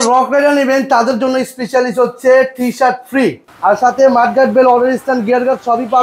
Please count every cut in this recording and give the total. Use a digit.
1